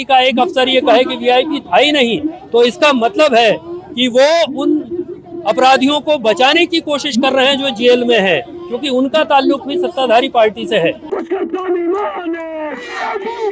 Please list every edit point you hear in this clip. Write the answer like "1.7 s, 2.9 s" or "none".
none